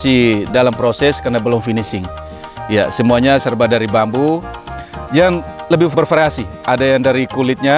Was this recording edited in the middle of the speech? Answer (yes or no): yes